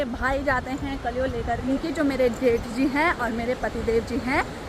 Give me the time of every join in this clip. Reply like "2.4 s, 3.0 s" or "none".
1.6 s